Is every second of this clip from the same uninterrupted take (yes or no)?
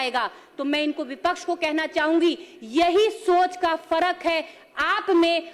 yes